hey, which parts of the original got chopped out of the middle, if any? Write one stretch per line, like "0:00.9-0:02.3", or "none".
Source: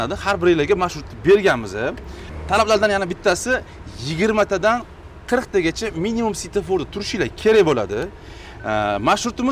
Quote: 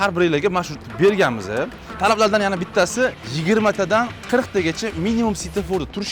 0:02.1-0:02.3
0:03.8-0:04.0
0:04.9-0:05.2